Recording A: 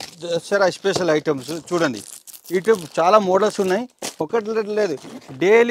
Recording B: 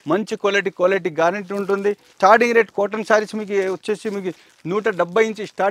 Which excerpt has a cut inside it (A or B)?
B